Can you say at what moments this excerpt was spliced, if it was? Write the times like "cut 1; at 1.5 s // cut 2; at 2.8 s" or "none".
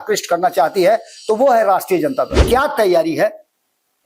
cut 1; at 2.4 s